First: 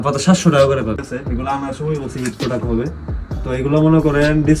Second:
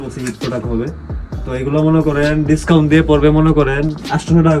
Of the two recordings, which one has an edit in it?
first; 1 cut; at 1.1 s

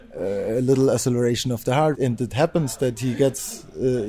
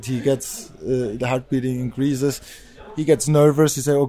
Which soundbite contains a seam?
first; 1 cut; at 1.9 s

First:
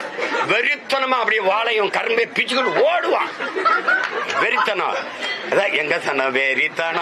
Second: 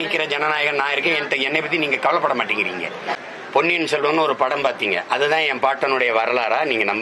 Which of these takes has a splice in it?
second; 1 cut; at 3.2 s

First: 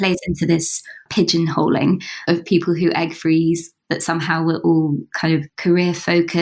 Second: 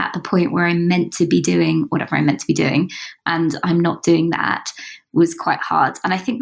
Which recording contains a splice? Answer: first; 4 cuts; at 1.0 s, 2.2 s, 3.7 s, 5.5 s

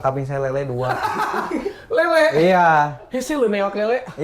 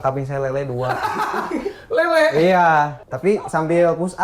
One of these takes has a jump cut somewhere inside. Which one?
second; 1 cut; at 3.0 s

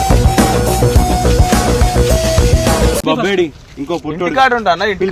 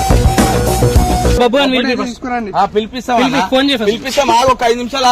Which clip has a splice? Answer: second; 1 cut; at 1.4 s

